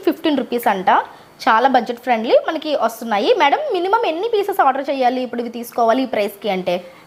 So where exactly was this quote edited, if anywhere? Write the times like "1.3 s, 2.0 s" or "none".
none